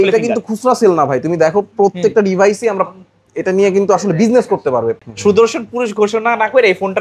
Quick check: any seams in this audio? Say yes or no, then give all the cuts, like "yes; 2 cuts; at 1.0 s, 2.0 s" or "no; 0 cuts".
yes; 1 cut; at 5.0 s